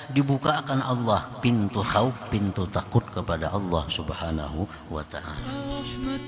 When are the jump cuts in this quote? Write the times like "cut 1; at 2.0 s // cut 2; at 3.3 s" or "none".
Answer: cut 1; at 5.3 s